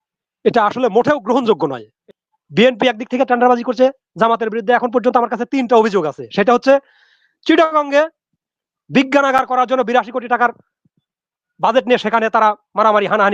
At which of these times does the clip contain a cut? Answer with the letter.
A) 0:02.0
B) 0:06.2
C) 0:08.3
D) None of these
A